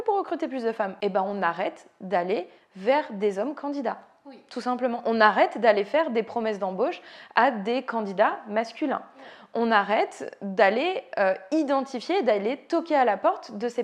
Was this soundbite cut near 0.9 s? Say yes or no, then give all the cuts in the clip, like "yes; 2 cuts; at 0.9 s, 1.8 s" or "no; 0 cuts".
yes; 1 cut; at 0.9 s